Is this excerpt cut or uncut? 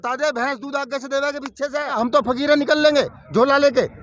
cut